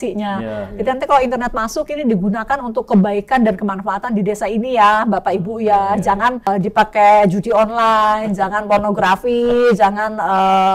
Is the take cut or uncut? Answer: cut